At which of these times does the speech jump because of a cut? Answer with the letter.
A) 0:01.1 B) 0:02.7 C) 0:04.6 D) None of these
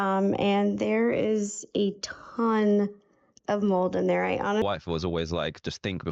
C